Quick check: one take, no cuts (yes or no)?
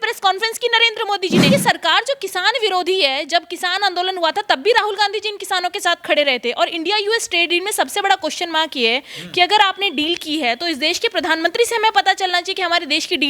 no